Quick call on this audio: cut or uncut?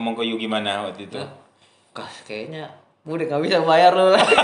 uncut